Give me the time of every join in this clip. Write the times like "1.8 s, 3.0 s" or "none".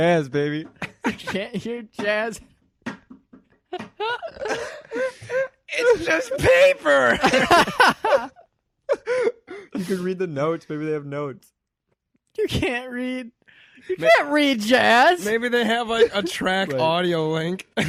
none